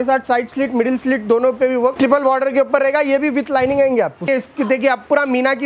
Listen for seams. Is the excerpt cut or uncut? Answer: cut